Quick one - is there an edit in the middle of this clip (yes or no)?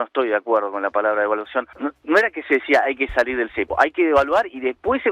yes